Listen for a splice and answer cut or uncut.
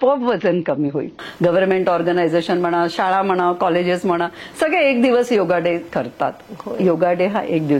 cut